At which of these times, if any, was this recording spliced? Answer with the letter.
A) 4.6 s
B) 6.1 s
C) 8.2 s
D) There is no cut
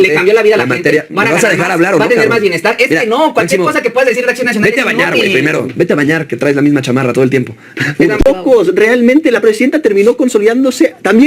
C